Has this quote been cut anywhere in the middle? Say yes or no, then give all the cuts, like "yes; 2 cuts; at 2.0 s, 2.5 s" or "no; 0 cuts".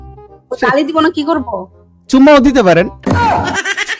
no; 0 cuts